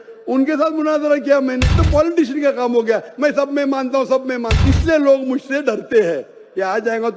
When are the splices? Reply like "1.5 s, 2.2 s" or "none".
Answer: 1.7 s, 4.5 s